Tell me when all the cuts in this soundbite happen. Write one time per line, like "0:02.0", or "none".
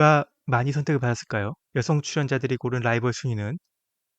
0:01.6